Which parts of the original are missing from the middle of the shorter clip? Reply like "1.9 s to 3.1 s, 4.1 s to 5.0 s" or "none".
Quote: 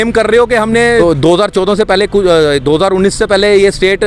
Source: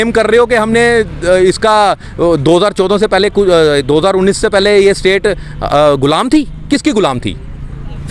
1.0 s to 2.2 s

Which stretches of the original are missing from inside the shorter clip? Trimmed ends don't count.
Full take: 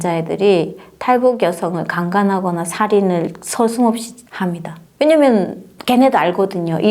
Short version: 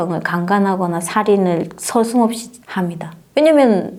none

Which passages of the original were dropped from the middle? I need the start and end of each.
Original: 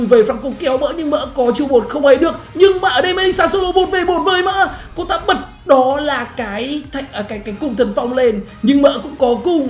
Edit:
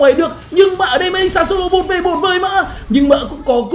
4.8 s to 8.5 s

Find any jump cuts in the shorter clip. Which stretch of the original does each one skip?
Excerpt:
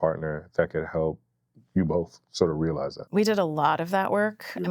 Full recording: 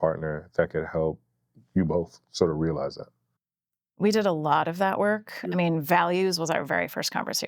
3.0 s to 3.9 s

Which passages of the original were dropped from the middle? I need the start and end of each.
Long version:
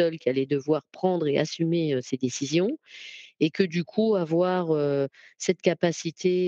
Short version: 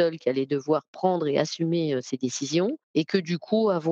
2.8 s to 3.3 s

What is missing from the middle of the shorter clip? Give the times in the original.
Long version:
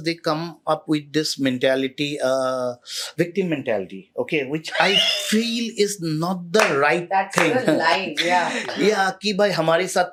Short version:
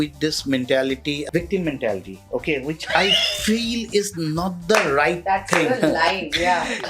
2.1 s to 3.1 s

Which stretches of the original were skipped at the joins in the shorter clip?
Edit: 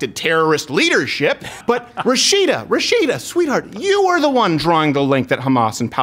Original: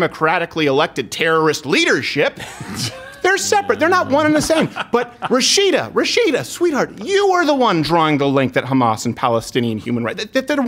2.5 s to 4.8 s

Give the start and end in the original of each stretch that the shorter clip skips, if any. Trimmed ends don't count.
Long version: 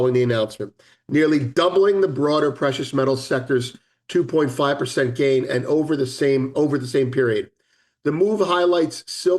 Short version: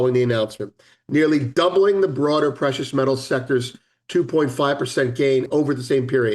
5.5 s to 6.5 s

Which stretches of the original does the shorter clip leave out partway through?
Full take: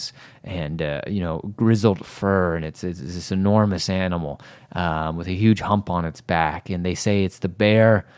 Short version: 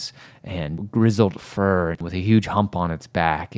0.8 s to 1.4 s, 2.7 s to 5.2 s

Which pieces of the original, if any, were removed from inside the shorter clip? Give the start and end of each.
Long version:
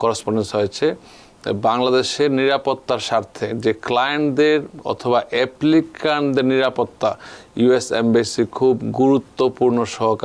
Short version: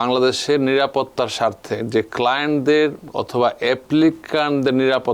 none

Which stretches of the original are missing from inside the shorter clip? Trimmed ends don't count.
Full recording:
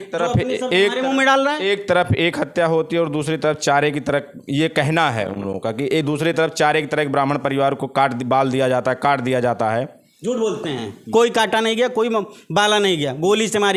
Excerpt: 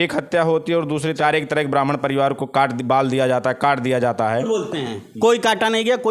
3.4 s to 6.6 s, 9.9 s to 10.4 s

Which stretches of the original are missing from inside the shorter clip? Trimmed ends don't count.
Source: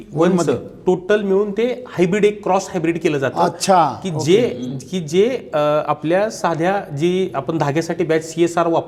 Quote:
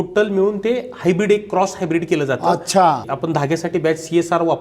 4.0 s to 7.3 s

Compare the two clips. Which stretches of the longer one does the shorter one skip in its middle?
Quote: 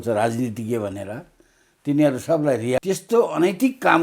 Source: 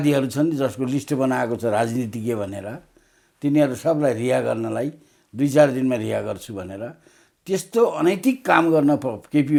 4.3 s to 7.4 s

